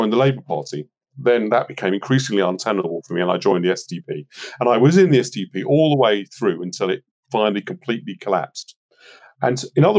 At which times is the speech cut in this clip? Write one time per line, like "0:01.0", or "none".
0:01.0
0:02.9